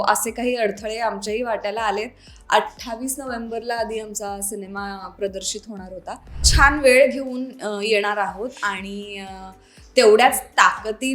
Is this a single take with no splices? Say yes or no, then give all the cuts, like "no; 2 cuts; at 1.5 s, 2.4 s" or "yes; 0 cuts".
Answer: no; 1 cut; at 6.5 s